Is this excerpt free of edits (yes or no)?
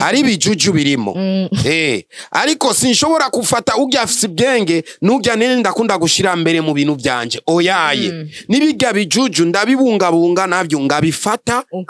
yes